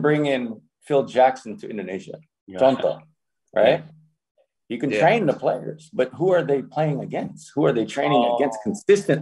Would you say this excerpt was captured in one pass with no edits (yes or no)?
yes